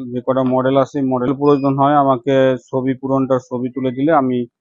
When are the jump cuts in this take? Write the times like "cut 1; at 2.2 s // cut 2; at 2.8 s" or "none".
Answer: cut 1; at 1.3 s